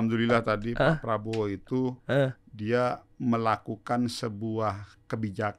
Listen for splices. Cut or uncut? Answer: uncut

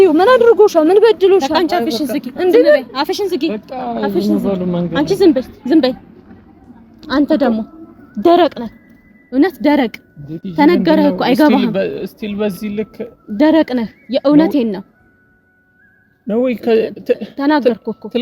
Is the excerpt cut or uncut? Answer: uncut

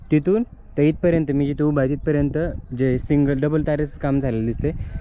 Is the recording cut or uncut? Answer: uncut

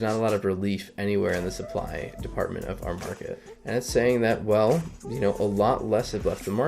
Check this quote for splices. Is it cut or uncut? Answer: cut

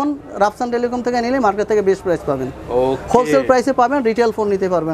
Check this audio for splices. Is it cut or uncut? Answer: uncut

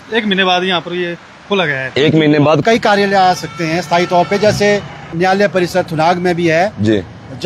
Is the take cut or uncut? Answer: cut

